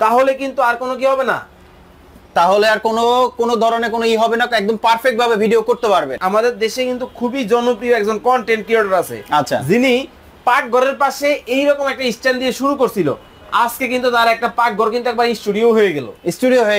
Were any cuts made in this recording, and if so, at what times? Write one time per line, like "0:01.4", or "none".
0:06.2